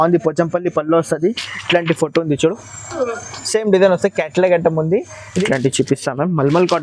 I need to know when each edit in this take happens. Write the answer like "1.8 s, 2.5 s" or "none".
5.2 s